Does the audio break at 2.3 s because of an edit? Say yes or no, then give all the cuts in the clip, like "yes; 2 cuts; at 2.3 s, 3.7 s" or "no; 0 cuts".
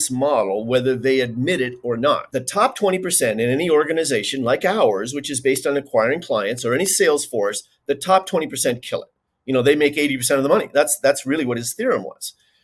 yes; 1 cut; at 2.3 s